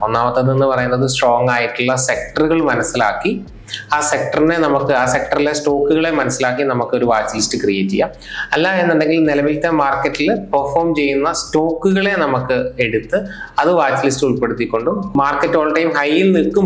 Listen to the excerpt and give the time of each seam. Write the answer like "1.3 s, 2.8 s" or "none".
15.2 s